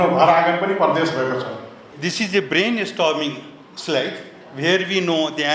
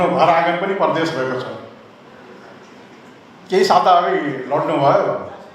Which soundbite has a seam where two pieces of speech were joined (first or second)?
first